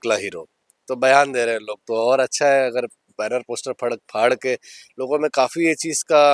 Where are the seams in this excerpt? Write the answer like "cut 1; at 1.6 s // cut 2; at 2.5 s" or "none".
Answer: none